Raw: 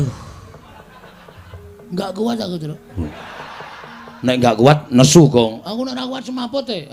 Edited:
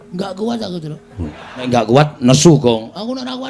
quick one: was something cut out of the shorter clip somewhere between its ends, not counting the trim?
yes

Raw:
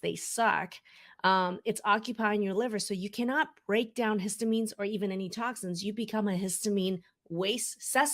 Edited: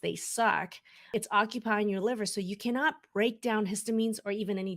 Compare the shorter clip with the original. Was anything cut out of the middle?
yes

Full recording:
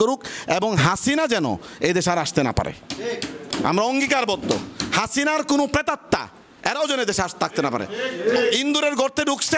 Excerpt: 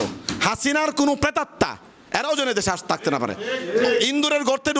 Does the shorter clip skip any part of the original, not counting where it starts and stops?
no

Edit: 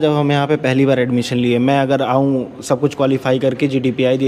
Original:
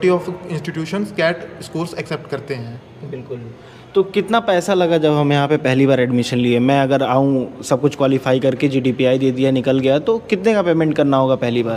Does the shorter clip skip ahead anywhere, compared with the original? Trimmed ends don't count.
no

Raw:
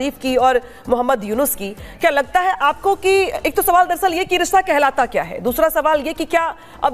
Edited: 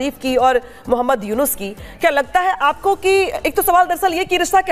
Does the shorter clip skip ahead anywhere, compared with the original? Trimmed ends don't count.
no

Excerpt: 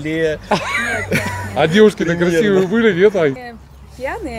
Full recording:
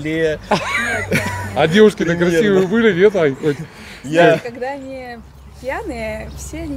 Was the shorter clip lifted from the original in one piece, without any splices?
no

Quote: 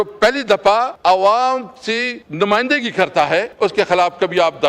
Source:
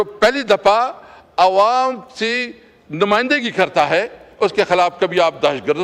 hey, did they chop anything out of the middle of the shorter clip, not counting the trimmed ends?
yes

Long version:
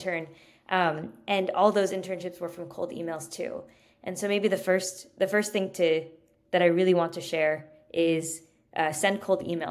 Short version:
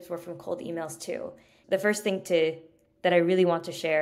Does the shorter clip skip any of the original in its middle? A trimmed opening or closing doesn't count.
yes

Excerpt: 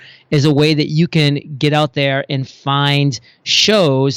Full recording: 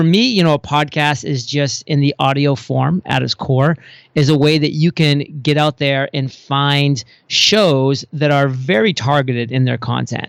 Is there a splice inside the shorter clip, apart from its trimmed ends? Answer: no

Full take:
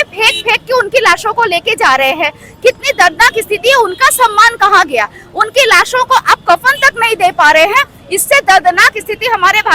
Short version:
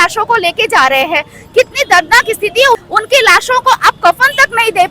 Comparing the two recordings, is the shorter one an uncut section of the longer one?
no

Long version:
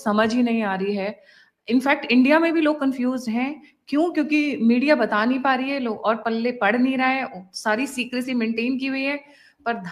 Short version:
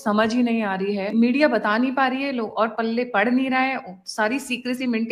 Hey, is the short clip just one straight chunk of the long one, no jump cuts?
no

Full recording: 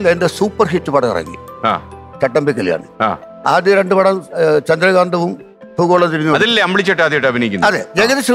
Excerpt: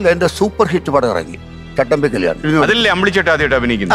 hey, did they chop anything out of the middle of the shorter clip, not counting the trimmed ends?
yes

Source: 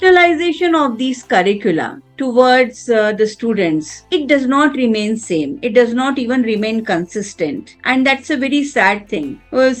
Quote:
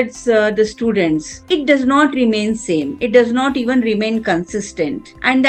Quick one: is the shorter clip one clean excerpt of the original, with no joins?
yes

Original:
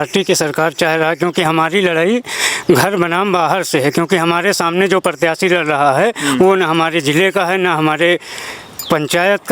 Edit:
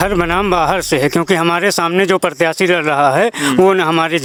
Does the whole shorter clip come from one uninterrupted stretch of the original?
yes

